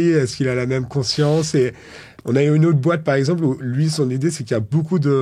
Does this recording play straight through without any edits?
yes; 0 cuts

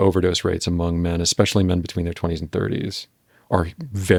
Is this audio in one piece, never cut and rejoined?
yes; 0 cuts

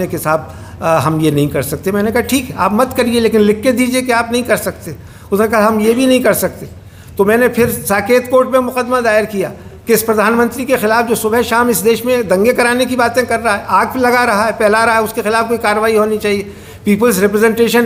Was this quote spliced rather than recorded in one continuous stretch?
no; 0 cuts

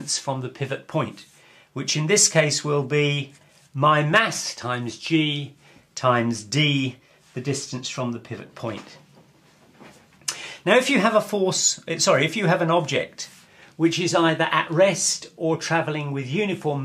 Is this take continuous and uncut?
no; 1 cut; at 8.4 s

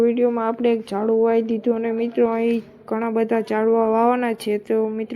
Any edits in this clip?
yes; 1 cut; at 2.1 s

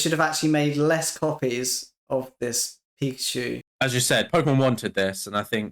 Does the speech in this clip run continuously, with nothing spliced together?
no; 1 cut; at 3.7 s

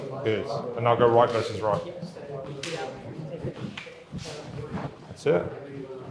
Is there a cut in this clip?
no; 0 cuts

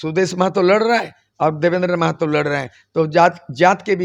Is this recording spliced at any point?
no; 0 cuts

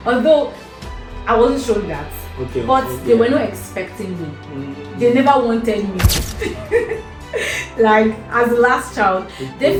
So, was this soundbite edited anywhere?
no; 0 cuts

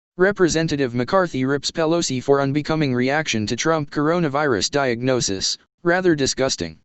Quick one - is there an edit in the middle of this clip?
no; 0 cuts

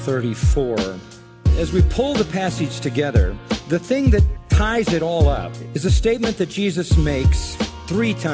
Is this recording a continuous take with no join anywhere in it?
yes; 0 cuts

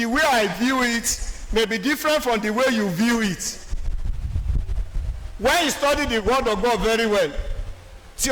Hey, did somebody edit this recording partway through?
no; 0 cuts

